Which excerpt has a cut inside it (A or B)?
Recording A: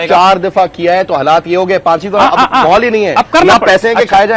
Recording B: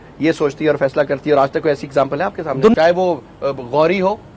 B